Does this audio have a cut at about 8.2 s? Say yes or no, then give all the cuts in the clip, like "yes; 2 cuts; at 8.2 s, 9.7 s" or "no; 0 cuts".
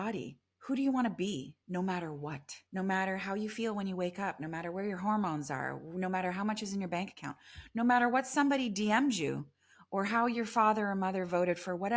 no; 2 cuts; at 1.6 s, 2.5 s